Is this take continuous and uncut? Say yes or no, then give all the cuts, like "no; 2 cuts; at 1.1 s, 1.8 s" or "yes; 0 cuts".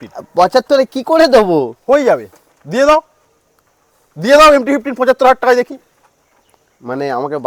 yes; 0 cuts